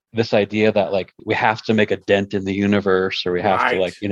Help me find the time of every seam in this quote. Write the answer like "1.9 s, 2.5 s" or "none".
1.1 s